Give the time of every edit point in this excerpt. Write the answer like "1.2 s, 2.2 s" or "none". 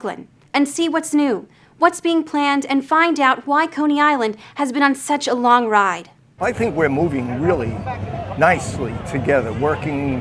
6.4 s